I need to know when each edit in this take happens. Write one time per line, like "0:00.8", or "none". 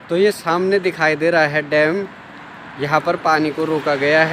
none

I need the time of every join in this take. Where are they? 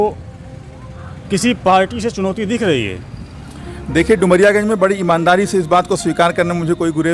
none

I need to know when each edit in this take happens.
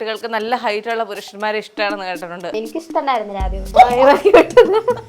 0:02.5
0:03.6

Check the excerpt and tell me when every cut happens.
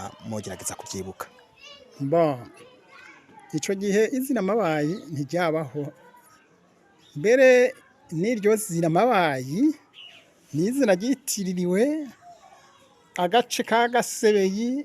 none

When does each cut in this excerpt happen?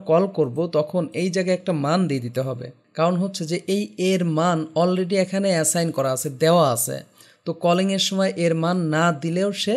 0:02.8

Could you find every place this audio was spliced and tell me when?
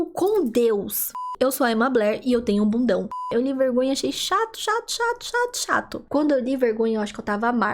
0:01.2
0:03.1
0:06.0

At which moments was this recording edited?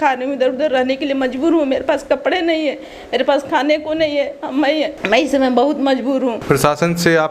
none

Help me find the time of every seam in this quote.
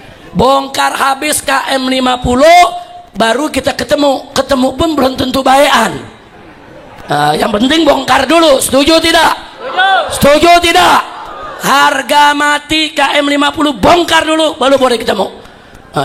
none

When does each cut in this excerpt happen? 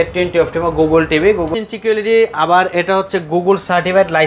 0:01.5

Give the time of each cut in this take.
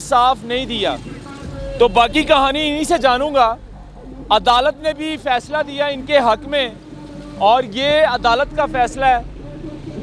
none

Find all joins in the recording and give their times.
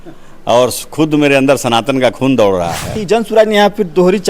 0:02.9

